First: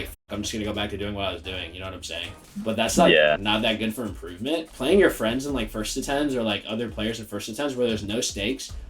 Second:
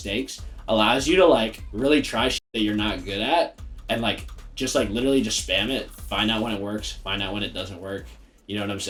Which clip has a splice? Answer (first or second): first